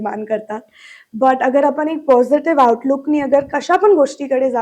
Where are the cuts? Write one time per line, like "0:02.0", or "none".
none